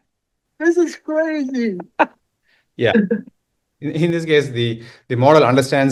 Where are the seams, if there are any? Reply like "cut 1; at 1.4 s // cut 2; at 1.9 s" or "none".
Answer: none